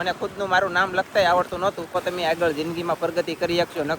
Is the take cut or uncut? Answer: cut